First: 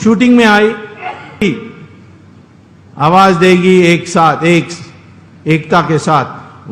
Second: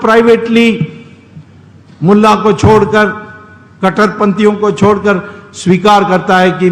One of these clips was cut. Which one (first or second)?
first